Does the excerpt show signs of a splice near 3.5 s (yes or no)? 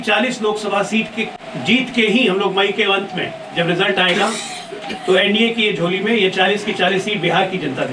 no